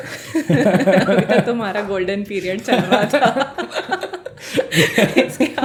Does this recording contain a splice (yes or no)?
no